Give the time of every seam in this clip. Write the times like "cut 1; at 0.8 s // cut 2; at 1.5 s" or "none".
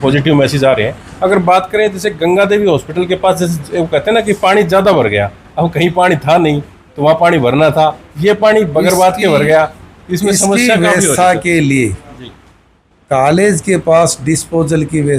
none